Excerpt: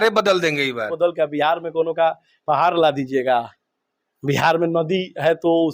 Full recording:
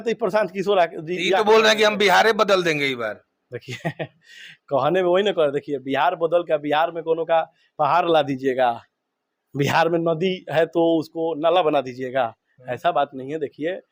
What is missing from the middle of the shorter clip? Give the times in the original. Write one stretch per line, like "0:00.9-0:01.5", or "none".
0:03.2-0:06.2